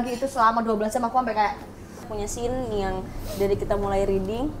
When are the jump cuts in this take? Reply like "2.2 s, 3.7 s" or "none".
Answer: 2.1 s